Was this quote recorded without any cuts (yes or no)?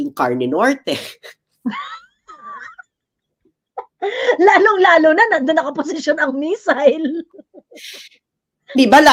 yes